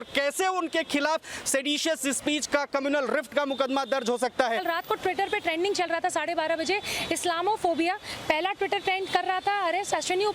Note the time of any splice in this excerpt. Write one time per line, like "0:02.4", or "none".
0:04.6